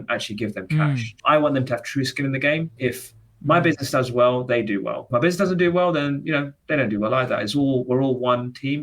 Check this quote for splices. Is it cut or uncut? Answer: cut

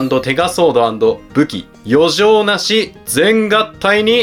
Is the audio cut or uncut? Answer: uncut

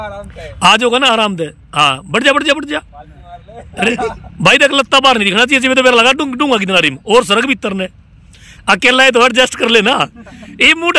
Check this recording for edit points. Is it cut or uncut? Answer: uncut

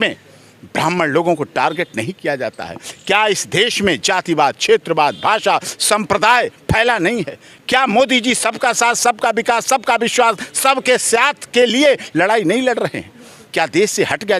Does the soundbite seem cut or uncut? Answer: uncut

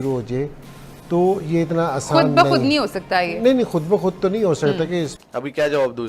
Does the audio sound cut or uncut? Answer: cut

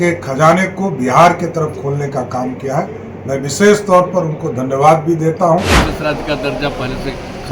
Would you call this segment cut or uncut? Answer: cut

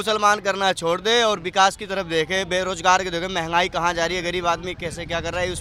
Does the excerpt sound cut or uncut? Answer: uncut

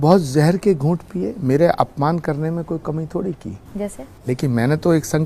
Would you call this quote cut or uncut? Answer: uncut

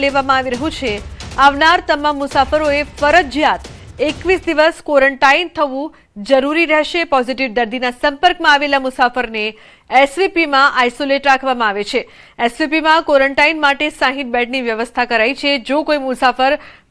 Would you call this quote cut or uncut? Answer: cut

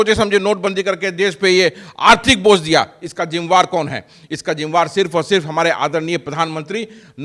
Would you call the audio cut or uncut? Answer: uncut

